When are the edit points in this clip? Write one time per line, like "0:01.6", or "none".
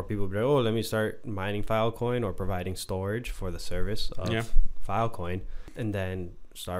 0:05.6